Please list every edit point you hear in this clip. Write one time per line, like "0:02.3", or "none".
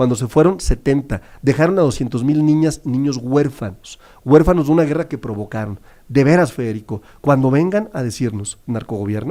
none